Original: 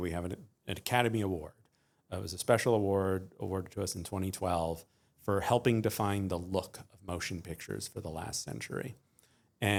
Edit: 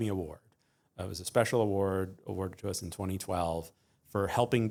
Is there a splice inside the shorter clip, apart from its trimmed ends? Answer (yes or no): no